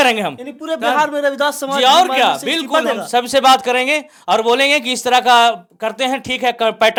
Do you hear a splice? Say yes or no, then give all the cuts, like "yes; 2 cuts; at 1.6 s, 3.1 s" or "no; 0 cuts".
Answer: no; 0 cuts